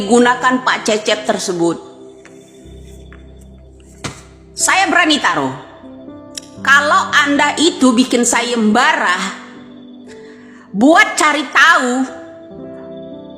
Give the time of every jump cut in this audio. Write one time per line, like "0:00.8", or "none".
0:01.2